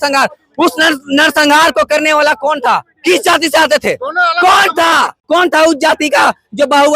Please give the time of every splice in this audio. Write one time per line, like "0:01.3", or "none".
0:05.2